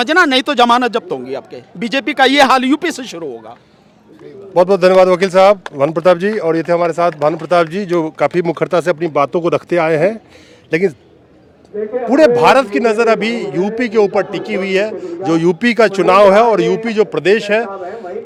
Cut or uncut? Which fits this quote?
uncut